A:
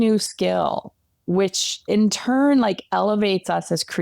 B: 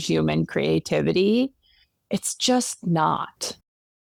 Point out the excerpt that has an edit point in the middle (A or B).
A